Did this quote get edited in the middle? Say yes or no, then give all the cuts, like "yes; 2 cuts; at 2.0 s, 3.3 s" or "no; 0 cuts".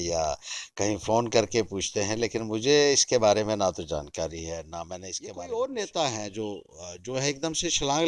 yes; 1 cut; at 5.1 s